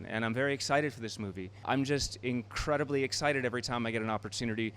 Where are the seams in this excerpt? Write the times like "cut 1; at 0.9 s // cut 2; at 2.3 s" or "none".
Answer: cut 1; at 1.6 s